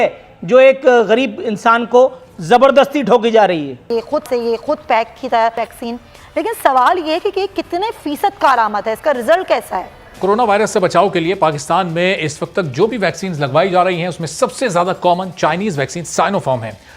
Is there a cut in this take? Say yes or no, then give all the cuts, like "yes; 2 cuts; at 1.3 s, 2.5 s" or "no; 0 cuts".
yes; 3 cuts; at 3.9 s, 5.6 s, 10.0 s